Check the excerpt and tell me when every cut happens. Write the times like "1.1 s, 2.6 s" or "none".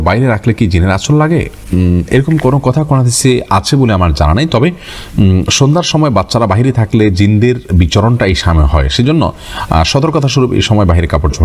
none